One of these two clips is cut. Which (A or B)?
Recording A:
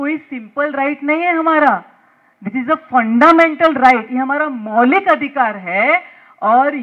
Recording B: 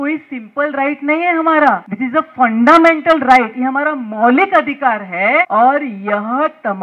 B